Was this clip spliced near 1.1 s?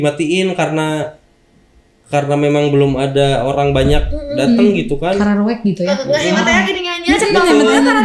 no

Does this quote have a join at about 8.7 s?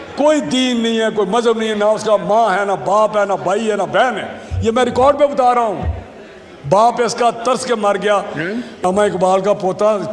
yes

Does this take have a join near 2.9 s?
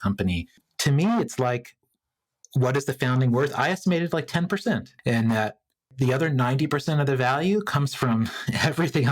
no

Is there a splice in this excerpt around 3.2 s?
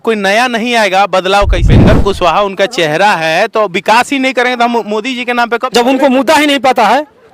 no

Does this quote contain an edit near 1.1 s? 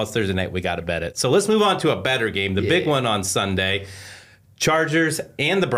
no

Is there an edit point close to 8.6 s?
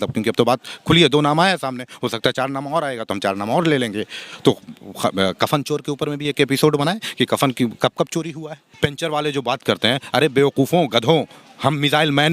yes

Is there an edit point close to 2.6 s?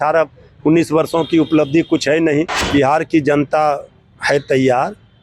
yes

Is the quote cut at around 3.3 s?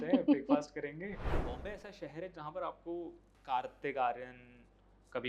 yes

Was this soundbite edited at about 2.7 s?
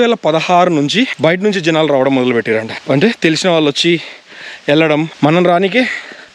yes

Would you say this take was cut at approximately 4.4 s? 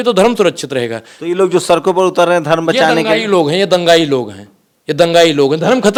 no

